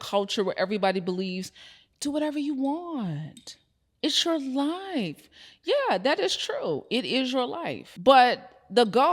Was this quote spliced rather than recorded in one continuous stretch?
yes; 1 cut; at 7.8 s

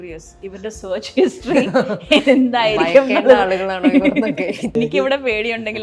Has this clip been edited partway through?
yes; 1 cut; at 4.8 s

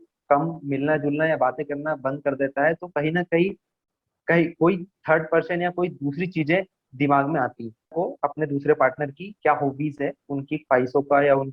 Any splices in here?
yes; 1 cut; at 7.9 s

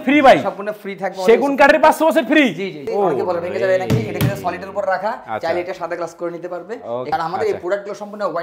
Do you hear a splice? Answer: yes; 2 cuts; at 2.8 s, 7.1 s

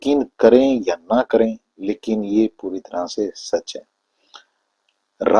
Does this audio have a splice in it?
no; 0 cuts

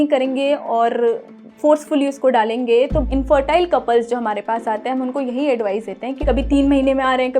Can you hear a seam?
yes; 2 cuts; at 3.0 s, 6.2 s

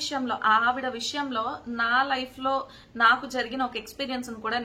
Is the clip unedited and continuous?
yes; 0 cuts

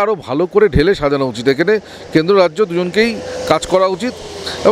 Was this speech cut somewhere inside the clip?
no; 0 cuts

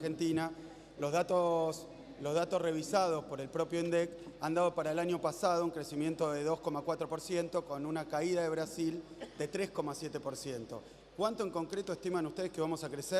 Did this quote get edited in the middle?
no; 0 cuts

